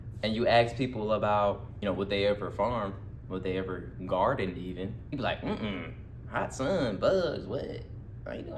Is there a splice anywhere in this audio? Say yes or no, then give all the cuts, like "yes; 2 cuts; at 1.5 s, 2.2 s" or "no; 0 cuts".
yes; 2 cuts; at 1.7 s, 5.0 s